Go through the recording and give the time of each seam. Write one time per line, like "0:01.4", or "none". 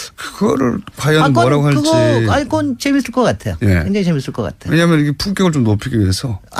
0:05.0

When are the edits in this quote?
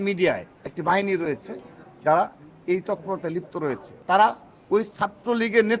0:03.9

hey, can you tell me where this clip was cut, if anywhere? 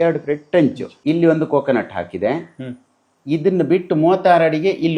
0:01.0

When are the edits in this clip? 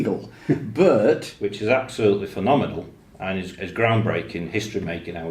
0:01.3

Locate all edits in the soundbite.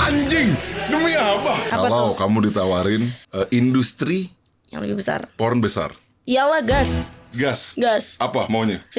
0:01.7

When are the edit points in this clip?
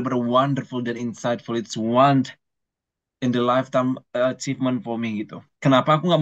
none

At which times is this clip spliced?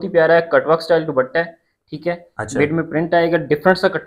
none

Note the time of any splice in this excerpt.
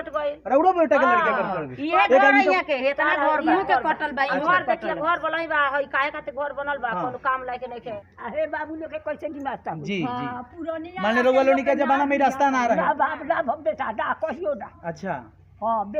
0:08.0

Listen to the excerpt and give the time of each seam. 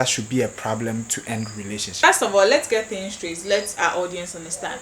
0:02.0

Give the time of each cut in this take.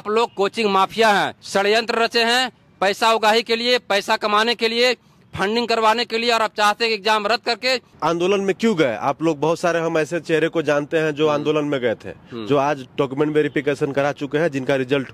0:01.4
0:07.9

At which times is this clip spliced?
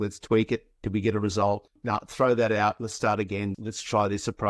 0:03.5

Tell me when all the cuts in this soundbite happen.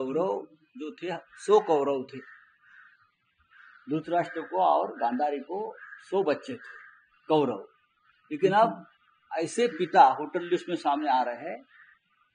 none

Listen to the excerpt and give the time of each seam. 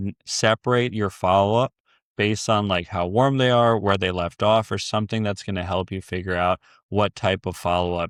none

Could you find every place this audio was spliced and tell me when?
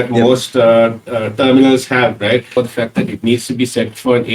0:02.5

